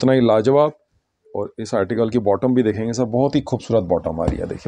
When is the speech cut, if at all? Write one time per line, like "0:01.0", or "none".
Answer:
none